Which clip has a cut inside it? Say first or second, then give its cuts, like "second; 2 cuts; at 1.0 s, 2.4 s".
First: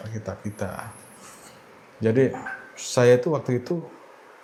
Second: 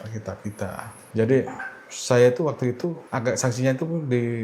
second; 2 cuts; at 1.0 s, 3.0 s